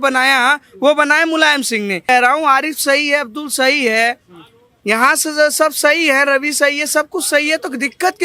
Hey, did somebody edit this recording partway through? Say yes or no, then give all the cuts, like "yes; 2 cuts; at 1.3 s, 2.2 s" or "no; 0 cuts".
yes; 1 cut; at 2.1 s